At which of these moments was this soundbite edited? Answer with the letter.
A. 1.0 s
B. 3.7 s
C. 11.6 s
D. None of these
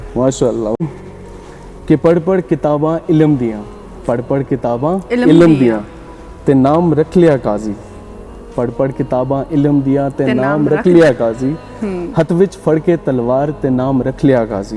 A